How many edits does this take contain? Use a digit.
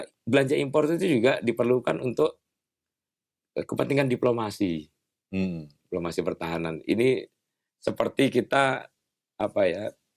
0